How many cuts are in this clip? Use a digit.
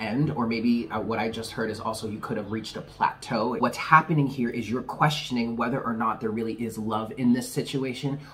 1